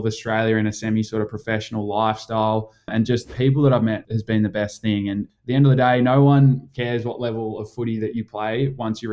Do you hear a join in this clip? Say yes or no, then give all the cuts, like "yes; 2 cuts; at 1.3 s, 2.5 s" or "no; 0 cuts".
yes; 3 cuts; at 3.0 s, 4.1 s, 5.3 s